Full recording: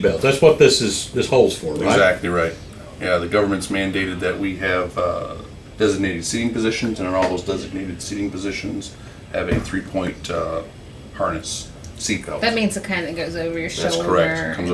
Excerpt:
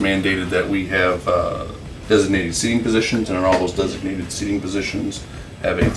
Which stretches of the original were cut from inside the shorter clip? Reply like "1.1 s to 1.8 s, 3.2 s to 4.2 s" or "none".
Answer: none